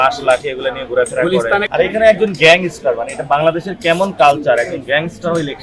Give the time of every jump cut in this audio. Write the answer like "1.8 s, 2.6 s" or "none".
1.7 s